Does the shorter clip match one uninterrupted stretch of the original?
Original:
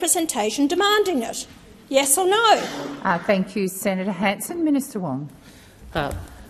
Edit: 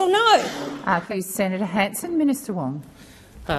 no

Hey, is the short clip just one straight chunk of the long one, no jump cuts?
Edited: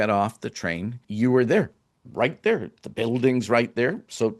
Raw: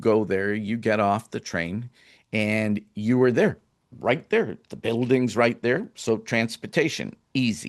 no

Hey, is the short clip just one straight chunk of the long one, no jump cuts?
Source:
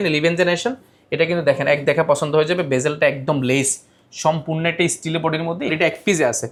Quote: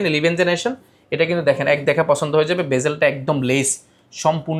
yes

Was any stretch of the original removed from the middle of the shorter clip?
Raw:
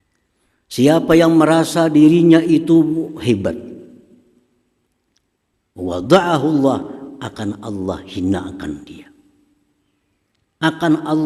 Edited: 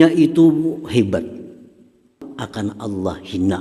yes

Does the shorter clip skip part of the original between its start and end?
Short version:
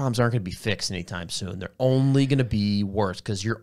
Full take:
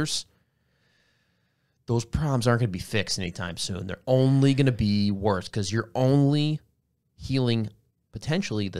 no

